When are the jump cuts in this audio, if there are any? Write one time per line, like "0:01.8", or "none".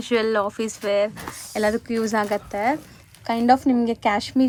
none